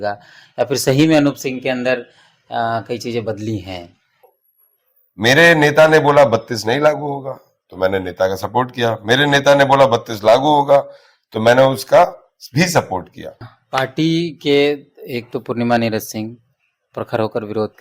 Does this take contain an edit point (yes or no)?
yes